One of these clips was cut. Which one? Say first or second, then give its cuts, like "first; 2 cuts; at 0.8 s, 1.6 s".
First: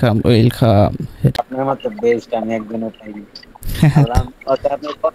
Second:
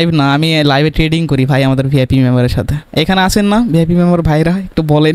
first; 1 cut; at 1.4 s